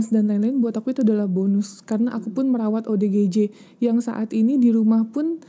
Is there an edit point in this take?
no; 0 cuts

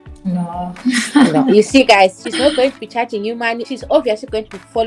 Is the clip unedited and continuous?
yes; 0 cuts

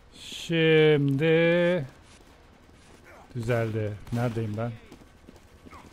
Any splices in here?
no; 0 cuts

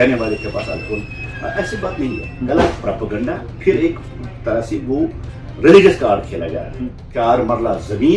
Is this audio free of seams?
no; 1 cut; at 7.0 s

